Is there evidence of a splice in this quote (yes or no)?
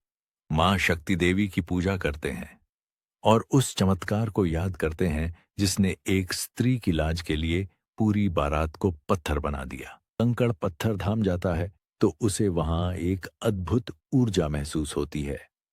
yes